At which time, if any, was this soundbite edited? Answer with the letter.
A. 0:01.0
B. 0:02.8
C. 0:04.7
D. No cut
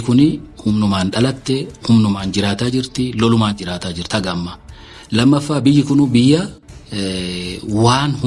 D